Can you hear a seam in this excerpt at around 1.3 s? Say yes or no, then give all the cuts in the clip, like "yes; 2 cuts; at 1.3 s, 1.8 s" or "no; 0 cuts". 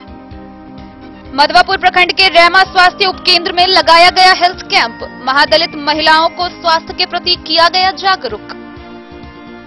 yes; 1 cut; at 1.3 s